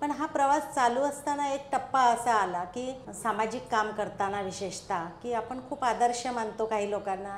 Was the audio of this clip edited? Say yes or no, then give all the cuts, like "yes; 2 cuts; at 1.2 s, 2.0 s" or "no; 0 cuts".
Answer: yes; 1 cut; at 3.0 s